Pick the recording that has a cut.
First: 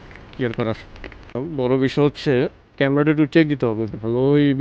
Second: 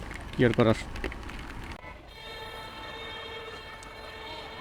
first; 2 cuts; at 1.4 s, 2.6 s

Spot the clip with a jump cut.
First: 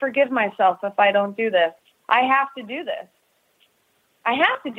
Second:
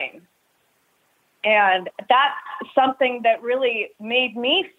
first; 1 cut; at 1.8 s

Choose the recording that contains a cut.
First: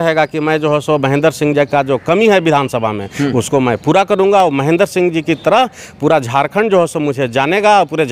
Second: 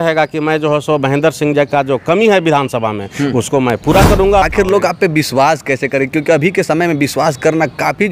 second; 1 cut; at 4.4 s

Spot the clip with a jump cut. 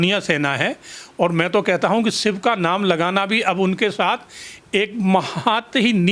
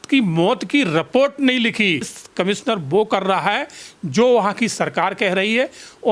second; 1 cut; at 2.2 s

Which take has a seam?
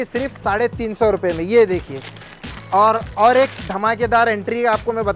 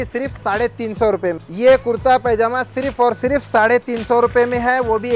second; 1 cut; at 1.4 s

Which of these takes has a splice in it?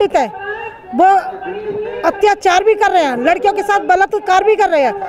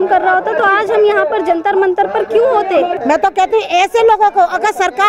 second; 1 cut; at 3.0 s

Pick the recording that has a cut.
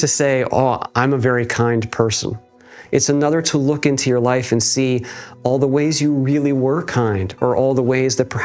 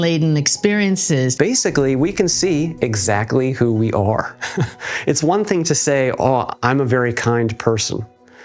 second; 1 cut; at 1.3 s

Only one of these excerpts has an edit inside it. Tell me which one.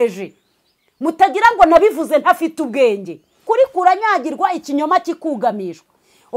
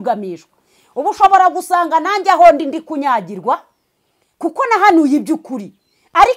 first; 1 cut; at 3.4 s

